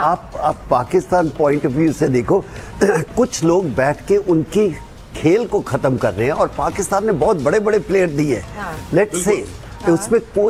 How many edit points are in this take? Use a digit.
0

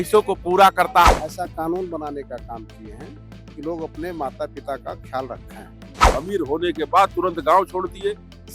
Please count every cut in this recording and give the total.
2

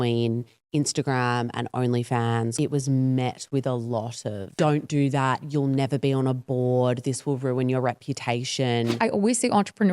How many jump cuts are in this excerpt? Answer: 3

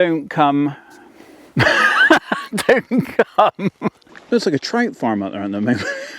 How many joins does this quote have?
1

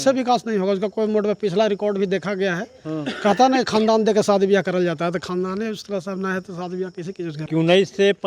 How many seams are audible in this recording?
1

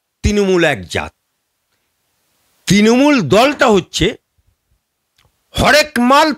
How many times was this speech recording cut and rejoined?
0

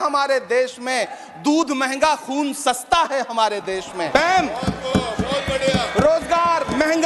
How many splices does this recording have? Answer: 0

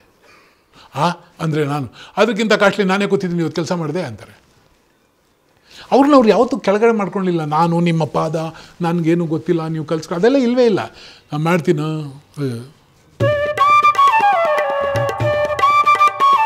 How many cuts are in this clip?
1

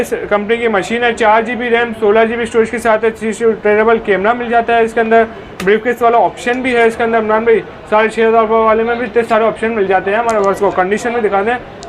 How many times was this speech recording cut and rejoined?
0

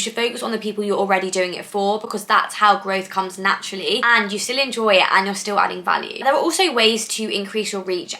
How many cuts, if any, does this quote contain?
0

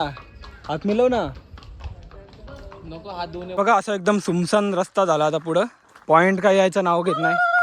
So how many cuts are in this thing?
1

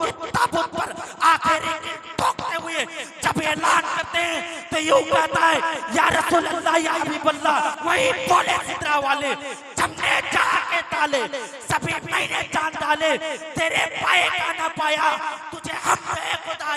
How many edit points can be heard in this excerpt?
1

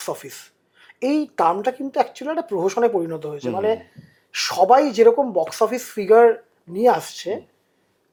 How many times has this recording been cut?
0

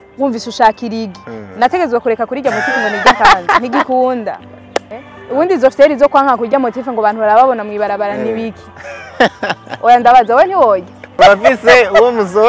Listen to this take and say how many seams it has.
2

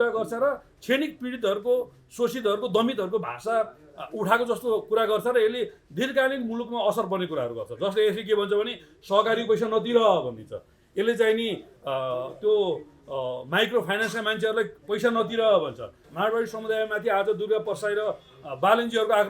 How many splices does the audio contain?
1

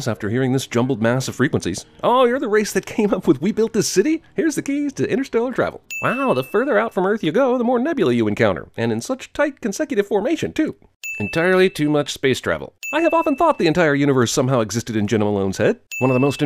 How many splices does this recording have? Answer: 0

